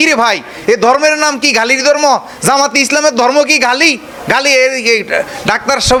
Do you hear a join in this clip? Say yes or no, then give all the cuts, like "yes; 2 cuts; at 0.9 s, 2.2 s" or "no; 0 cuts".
no; 0 cuts